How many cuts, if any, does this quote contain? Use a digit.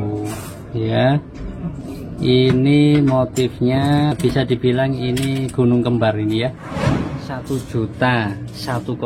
3